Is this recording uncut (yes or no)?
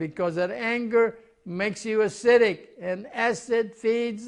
yes